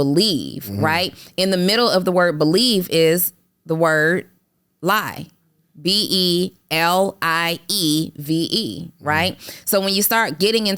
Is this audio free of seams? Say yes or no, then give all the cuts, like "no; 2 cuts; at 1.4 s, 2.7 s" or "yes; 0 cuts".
yes; 0 cuts